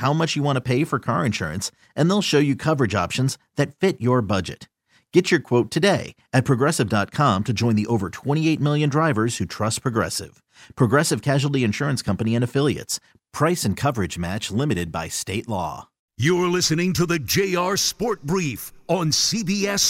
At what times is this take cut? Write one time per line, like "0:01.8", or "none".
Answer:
0:16.0